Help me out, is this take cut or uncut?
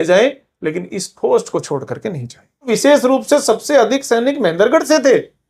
cut